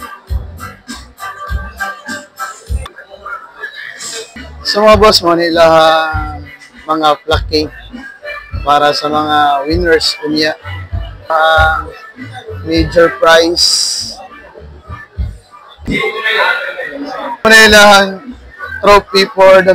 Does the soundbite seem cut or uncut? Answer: cut